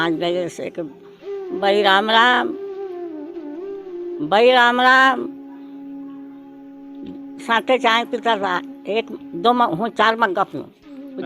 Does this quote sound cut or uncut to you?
uncut